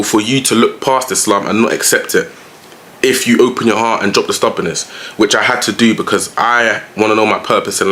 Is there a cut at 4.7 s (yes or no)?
no